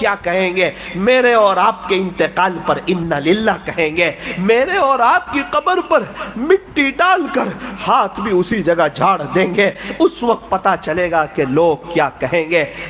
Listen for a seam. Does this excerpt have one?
no; 0 cuts

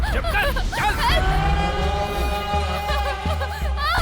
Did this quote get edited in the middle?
no; 0 cuts

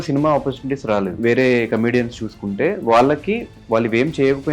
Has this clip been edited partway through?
yes; 1 cut; at 1.2 s

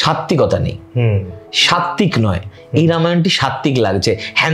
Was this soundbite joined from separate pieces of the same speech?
no; 0 cuts

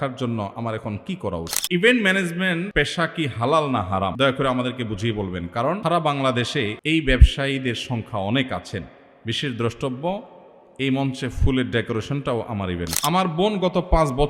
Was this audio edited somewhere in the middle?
yes; 6 cuts; at 1.5 s, 2.7 s, 4.1 s, 5.8 s, 6.8 s, 12.9 s

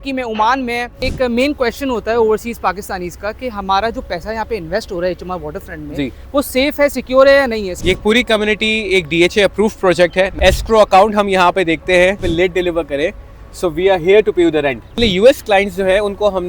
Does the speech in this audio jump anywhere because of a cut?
yes; 5 cuts; at 1.0 s, 7.7 s, 10.3 s, 12.3 s, 15.0 s

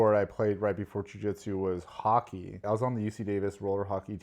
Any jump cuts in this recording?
yes; 1 cut; at 2.6 s

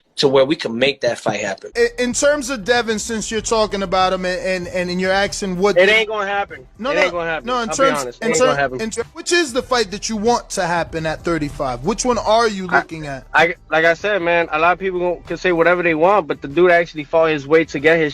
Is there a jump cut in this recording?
yes; 1 cut; at 1.7 s

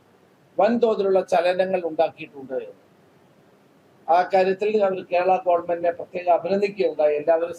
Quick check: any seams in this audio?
no; 0 cuts

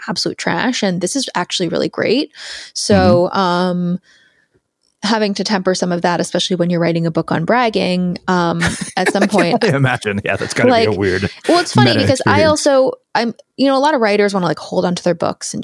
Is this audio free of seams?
yes; 0 cuts

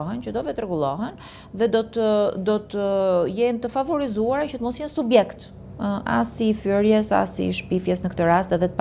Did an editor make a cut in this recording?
no; 0 cuts

